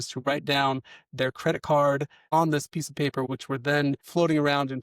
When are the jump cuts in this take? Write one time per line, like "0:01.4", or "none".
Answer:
0:02.2
0:03.3